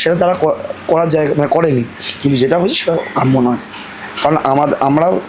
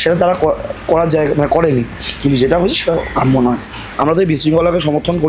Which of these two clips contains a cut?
second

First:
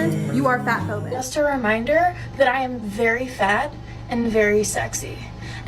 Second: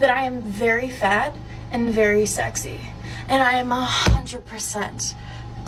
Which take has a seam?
first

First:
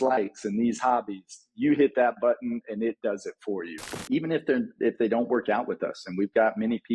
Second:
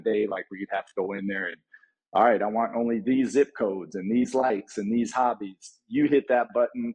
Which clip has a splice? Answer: first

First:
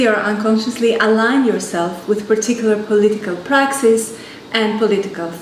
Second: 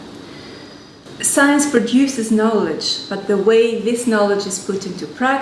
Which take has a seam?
second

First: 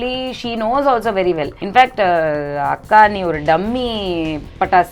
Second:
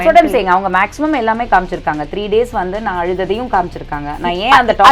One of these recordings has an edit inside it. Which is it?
first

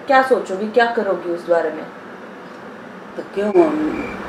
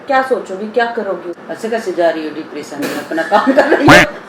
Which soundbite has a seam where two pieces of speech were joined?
second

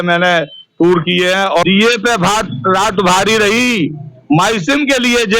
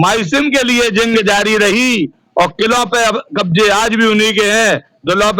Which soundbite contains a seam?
first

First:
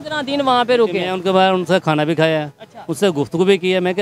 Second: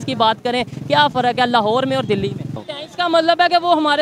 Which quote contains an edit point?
second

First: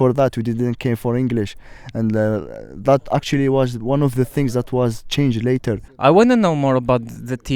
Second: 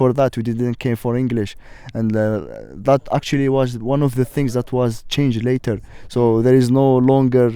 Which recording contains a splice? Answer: first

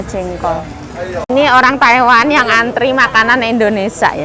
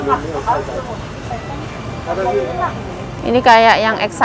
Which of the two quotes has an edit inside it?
first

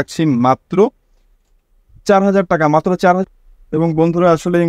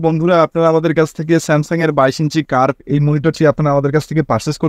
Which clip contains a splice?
first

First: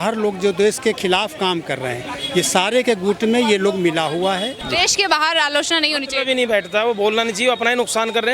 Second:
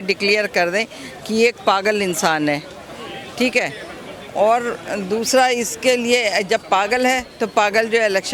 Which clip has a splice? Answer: first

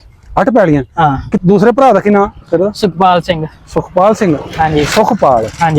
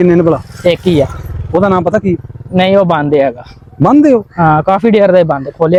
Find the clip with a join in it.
first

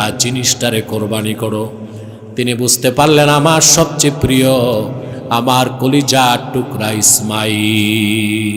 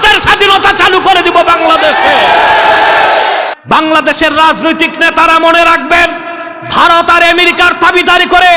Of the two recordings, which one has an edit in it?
second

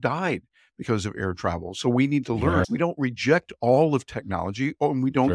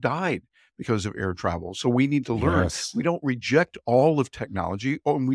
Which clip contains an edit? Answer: first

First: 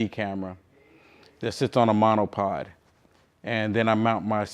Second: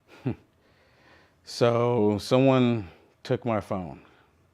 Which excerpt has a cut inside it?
first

